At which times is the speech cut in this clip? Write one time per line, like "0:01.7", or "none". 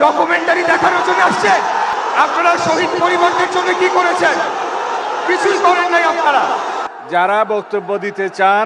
0:01.9
0:06.9